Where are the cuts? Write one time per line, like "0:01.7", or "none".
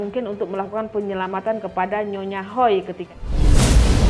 0:03.0